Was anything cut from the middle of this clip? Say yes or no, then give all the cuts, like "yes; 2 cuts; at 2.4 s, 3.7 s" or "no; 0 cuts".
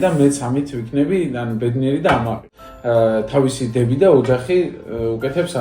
yes; 1 cut; at 2.5 s